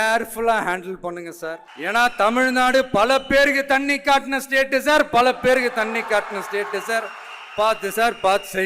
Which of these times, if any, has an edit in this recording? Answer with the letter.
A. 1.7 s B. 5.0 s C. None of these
A